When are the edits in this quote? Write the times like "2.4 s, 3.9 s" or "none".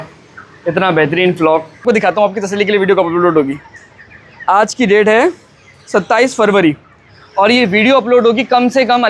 1.8 s